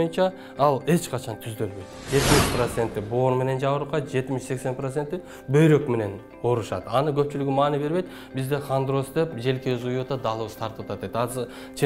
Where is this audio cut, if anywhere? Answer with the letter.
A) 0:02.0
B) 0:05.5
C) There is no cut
A